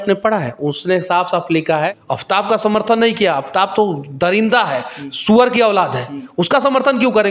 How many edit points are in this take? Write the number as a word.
one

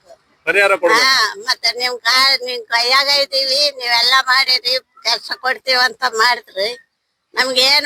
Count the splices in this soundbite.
zero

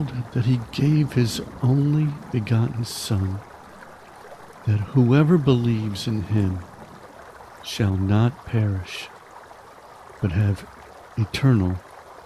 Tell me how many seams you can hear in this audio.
two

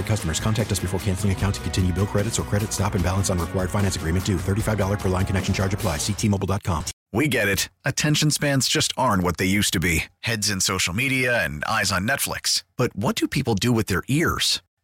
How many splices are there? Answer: one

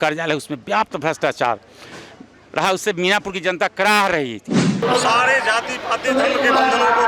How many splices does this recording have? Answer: one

